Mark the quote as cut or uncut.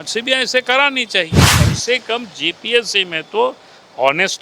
cut